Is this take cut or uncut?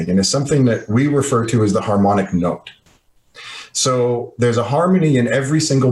uncut